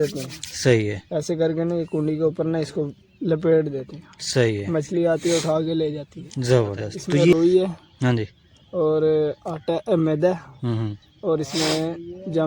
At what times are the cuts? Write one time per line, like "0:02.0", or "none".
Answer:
0:07.3